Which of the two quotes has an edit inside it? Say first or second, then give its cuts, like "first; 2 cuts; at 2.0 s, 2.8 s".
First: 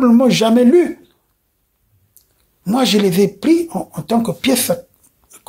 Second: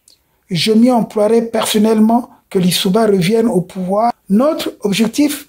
second; 1 cut; at 4.2 s